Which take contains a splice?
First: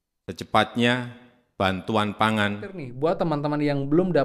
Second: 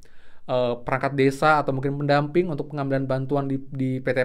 first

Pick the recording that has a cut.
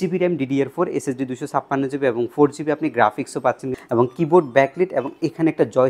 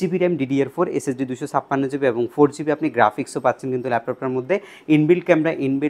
first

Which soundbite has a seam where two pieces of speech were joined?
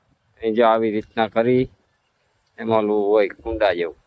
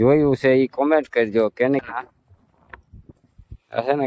second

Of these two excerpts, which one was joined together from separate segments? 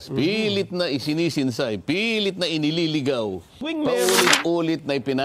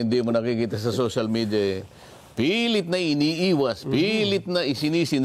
first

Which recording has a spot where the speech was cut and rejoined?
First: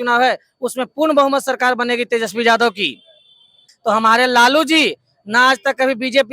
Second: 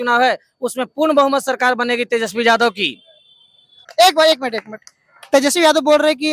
first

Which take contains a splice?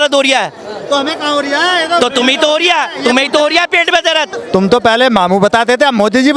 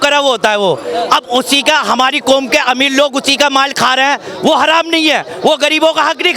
first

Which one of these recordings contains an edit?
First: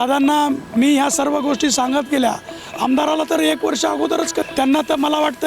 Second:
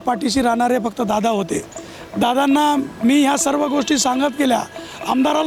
first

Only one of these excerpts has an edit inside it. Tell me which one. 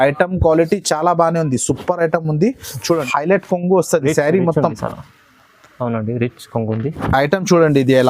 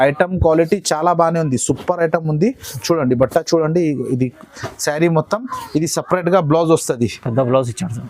first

